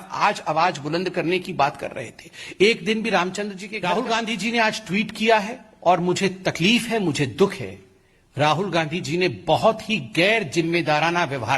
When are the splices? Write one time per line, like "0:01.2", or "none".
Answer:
0:03.6

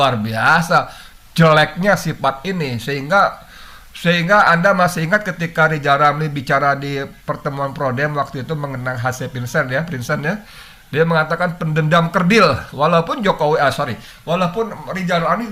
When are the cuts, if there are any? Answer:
none

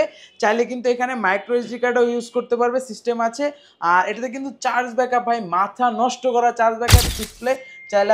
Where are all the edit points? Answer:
0:07.1

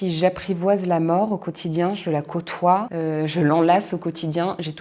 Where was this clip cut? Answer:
none

